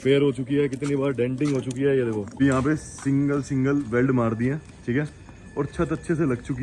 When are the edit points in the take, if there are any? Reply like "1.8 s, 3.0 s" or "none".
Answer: 2.4 s